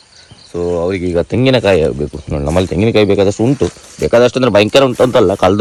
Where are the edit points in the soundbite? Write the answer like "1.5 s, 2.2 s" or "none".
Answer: none